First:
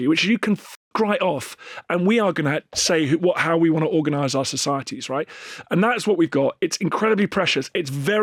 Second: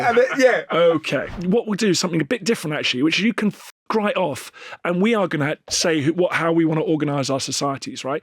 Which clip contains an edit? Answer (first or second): second